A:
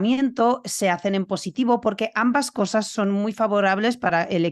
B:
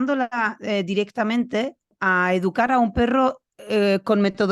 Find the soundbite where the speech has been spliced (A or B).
B